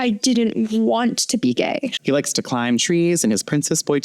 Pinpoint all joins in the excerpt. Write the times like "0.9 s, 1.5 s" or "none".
1.9 s